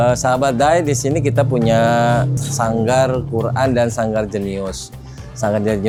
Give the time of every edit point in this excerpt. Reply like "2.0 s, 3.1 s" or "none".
none